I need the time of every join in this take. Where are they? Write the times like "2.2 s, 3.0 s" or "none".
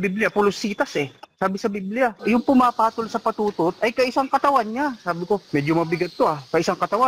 2.2 s, 5.4 s

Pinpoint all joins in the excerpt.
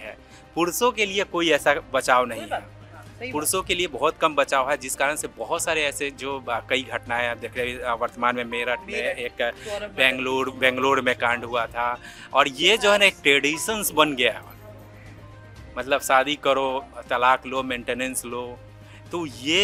none

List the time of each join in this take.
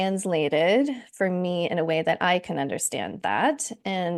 none

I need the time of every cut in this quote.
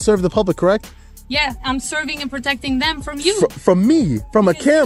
none

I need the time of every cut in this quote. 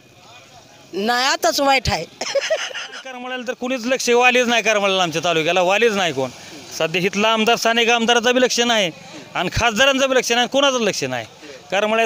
3.4 s

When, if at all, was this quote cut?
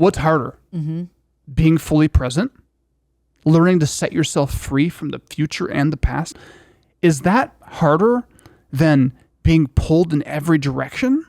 6.3 s

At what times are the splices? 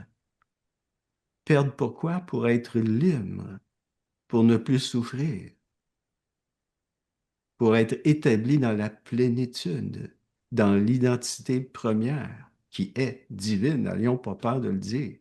none

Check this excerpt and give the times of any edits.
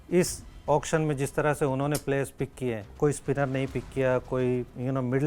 2.9 s

